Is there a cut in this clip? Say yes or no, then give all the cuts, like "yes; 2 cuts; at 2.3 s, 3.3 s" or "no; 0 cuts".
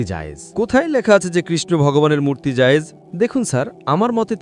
yes; 1 cut; at 3.0 s